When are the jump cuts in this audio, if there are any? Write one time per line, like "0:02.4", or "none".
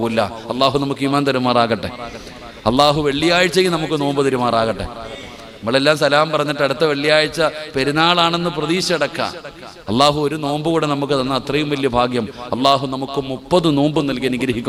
none